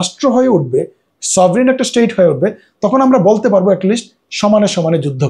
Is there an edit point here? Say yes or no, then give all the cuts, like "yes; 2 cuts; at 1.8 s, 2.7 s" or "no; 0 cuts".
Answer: no; 0 cuts